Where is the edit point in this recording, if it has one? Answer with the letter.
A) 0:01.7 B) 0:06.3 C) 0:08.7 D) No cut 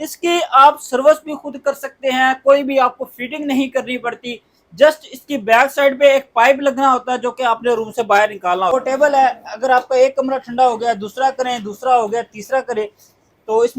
C